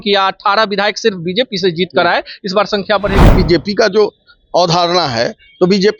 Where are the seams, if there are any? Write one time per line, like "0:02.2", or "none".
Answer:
0:03.3